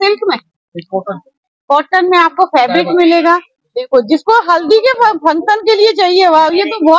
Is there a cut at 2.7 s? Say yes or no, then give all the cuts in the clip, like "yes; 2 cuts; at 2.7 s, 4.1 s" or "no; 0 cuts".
no; 0 cuts